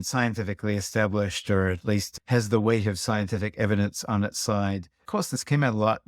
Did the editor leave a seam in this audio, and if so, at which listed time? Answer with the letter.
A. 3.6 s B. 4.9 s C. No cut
B